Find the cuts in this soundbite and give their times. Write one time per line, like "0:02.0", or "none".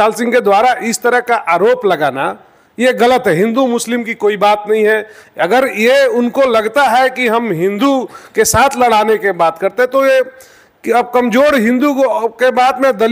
none